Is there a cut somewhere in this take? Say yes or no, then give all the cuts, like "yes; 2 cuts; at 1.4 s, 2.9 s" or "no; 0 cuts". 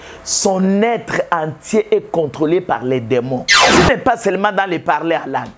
yes; 1 cut; at 3.7 s